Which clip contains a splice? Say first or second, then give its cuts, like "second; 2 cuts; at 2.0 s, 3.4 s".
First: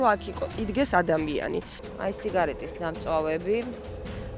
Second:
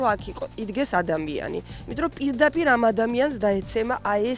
first; 1 cut; at 1.8 s